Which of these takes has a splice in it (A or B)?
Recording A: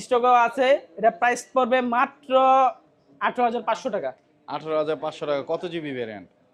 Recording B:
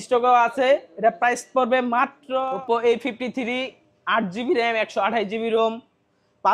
B